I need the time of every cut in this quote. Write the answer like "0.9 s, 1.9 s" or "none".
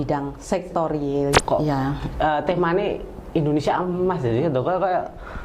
1.4 s